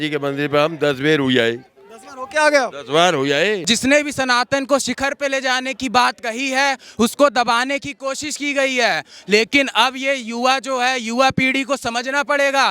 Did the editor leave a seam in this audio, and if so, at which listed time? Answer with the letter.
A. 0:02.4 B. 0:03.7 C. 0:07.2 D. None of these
B